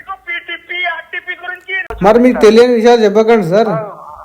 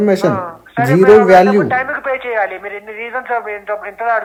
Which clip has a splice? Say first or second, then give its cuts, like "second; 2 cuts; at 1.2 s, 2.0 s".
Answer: first; 1 cut; at 1.9 s